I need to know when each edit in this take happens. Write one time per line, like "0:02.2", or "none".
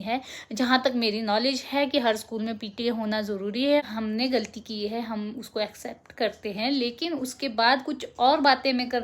0:03.8